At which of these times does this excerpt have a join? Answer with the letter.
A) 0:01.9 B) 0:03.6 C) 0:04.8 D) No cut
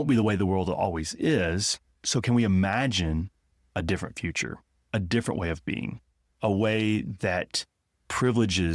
A